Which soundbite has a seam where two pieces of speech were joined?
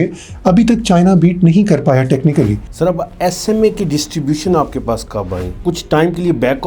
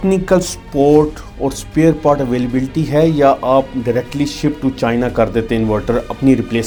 first; 2 cuts; at 2.7 s, 5.6 s

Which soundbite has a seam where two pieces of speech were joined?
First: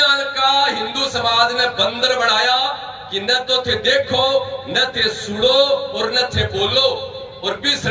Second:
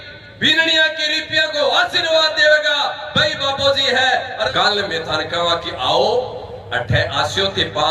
second; 1 cut; at 4.5 s

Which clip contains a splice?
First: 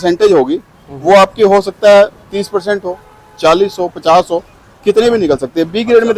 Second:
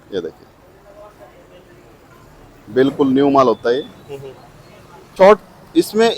second; 1 cut; at 5.1 s

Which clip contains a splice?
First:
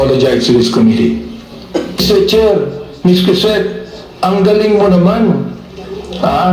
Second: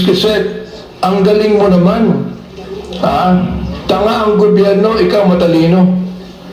first; 1 cut; at 2.0 s

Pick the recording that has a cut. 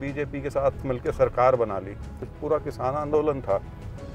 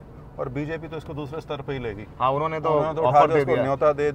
first; 1 cut; at 2.3 s

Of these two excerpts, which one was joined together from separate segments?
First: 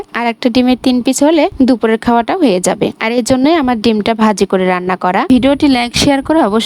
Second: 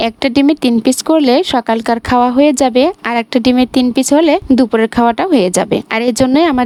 first; 1 cut; at 5.3 s

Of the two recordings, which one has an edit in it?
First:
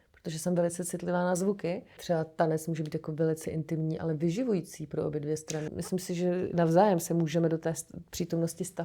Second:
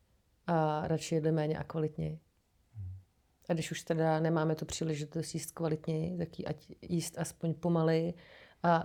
first; 2 cuts; at 2.0 s, 5.7 s

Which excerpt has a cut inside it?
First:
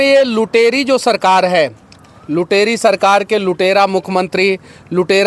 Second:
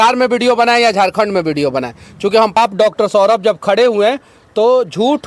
second; 1 cut; at 2.6 s

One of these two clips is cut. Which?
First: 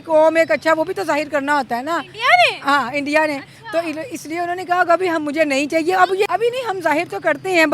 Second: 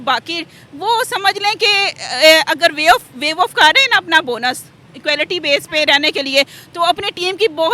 first; 1 cut; at 6.3 s

